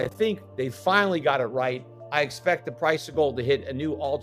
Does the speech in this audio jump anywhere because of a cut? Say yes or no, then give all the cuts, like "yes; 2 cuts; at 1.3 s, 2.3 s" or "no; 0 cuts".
yes; 1 cut; at 1.9 s